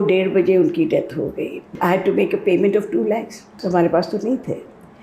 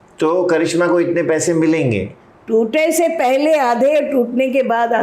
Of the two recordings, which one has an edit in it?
first; 2 cuts; at 1.7 s, 3.6 s

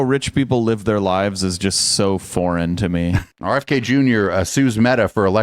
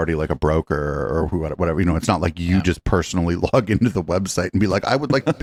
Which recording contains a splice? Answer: first; 1 cut; at 3.3 s

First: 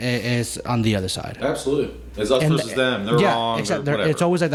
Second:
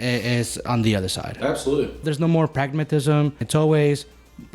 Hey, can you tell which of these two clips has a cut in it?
second; 2 cuts; at 2.1 s, 3.4 s

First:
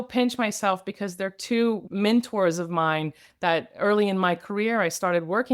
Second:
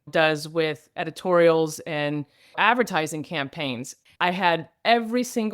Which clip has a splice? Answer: second; 1 cut; at 4.0 s

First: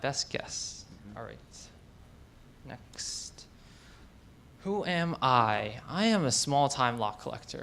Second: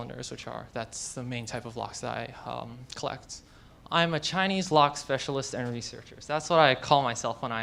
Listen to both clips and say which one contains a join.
first; 1 cut; at 3.8 s

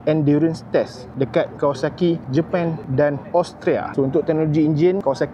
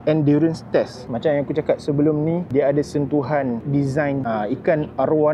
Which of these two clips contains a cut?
second; 2 cuts; at 1.0 s, 4.2 s

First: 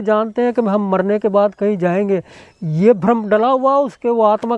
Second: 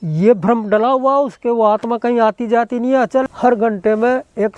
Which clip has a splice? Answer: second; 1 cut; at 3.2 s

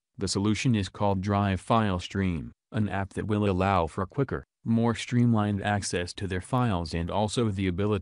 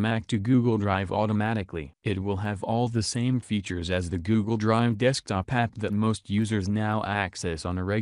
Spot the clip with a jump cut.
second; 1 cut; at 1.9 s

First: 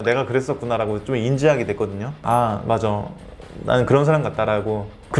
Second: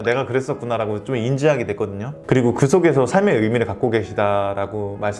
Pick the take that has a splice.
first; 1 cut; at 2.1 s

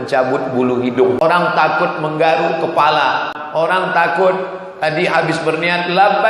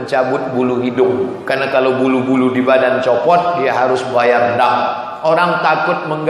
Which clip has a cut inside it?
first; 2 cuts; at 1.2 s, 3.3 s

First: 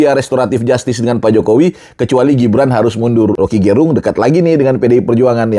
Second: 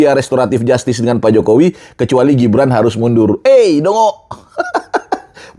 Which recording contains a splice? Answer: first; 1 cut; at 3.4 s

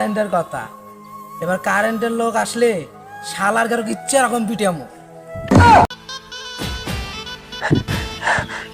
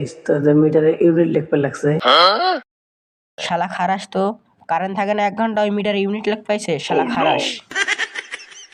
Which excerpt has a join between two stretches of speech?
first; 1 cut; at 5.9 s

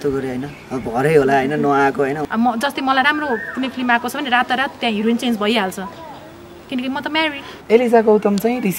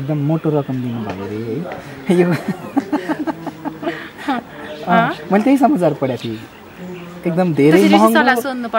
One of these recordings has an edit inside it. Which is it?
first; 2 cuts; at 2.2 s, 7.6 s

